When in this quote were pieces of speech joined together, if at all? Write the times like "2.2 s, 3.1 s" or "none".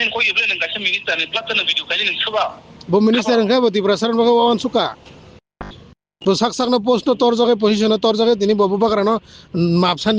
none

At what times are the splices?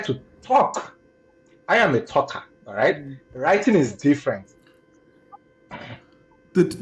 none

